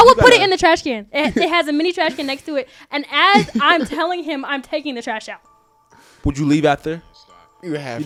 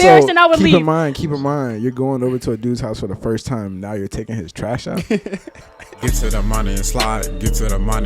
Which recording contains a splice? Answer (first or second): second